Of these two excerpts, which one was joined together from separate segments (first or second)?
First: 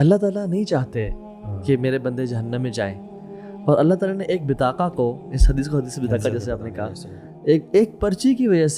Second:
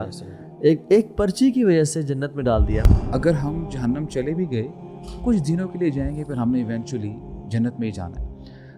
second